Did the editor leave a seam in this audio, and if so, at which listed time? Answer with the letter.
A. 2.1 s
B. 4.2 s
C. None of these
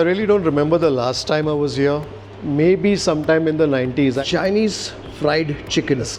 B